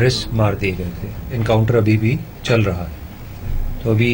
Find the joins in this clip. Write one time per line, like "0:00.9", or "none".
0:01.4